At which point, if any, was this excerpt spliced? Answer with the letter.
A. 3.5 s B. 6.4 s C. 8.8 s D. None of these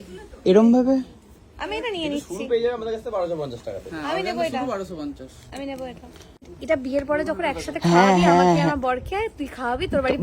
B